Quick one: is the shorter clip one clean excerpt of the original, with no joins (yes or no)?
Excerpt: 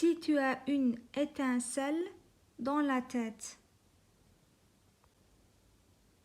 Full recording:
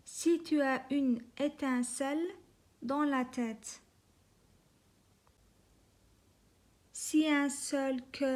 no